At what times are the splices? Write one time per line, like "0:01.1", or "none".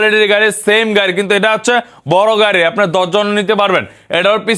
none